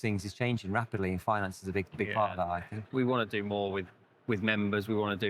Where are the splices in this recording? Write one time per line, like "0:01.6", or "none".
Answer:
0:02.7